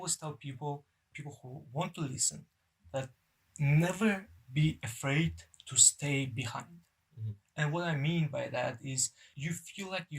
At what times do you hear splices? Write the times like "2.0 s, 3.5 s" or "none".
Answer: 1.1 s, 3.1 s, 9.2 s